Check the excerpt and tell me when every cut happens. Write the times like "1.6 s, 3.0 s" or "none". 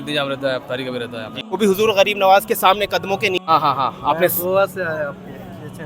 1.5 s, 3.4 s